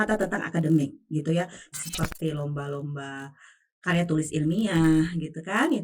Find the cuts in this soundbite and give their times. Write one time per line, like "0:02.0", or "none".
0:01.6